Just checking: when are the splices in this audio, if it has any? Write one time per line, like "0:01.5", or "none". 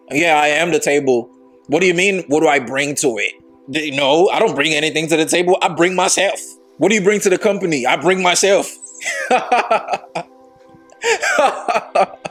none